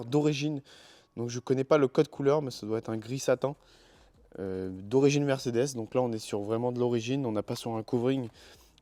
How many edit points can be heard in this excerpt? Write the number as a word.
zero